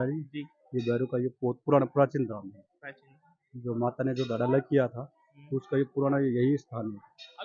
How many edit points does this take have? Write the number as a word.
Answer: zero